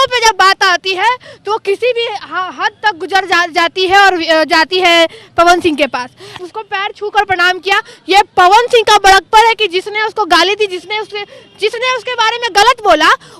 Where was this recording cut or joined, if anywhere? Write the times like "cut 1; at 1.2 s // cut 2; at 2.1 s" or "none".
cut 1; at 6.4 s